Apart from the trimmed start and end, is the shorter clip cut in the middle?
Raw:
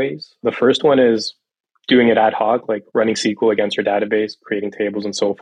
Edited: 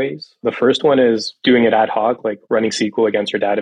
yes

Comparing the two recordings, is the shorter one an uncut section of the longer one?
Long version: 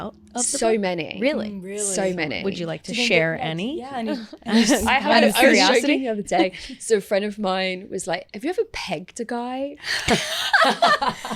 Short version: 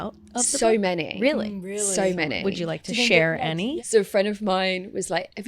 no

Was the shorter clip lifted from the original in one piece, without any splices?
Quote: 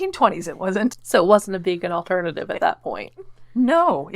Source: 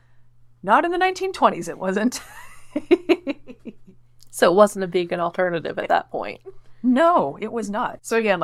no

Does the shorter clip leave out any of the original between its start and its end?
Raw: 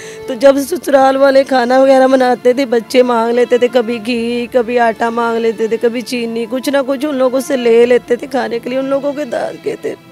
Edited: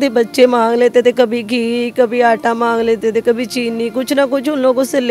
no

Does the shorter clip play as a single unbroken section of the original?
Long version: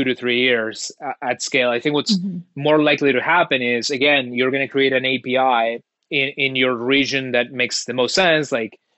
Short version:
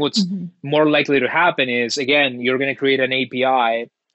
yes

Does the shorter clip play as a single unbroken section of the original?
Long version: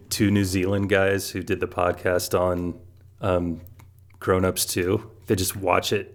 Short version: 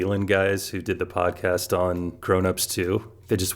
no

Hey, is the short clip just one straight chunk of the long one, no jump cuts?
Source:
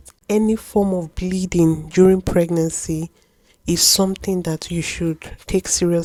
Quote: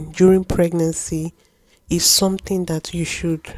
yes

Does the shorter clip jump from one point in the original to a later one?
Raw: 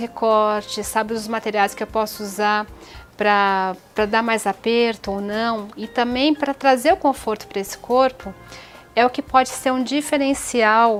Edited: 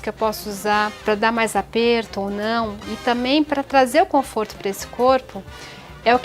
yes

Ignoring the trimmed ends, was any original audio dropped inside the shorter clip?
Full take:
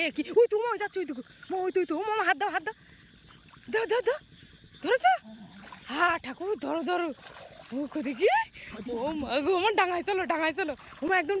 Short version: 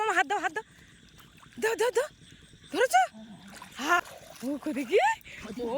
yes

